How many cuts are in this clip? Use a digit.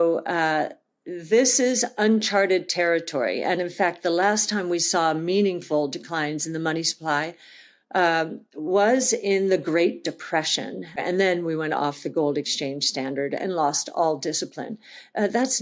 1